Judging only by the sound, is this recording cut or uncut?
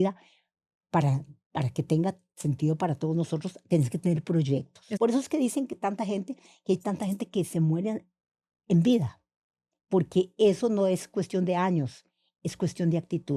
cut